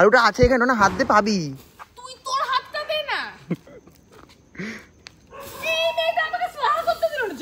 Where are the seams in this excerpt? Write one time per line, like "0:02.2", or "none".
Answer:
none